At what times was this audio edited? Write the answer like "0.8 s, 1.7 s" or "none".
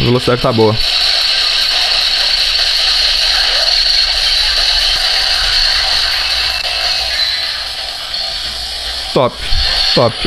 none